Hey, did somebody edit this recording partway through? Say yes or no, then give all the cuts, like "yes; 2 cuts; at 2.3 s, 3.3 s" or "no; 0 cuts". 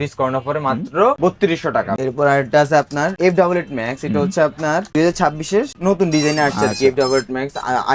no; 0 cuts